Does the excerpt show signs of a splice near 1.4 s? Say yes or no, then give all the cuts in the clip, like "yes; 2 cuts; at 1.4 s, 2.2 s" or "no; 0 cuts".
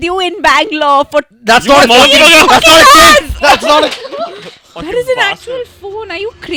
no; 0 cuts